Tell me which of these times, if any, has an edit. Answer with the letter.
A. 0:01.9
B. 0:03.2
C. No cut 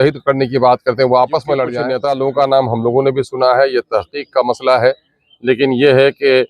A